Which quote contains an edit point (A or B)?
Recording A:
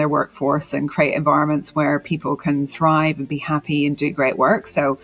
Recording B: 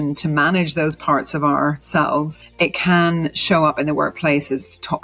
B